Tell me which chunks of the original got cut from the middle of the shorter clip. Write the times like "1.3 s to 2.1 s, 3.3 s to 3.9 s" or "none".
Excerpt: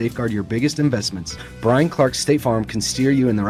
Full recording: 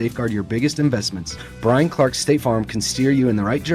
none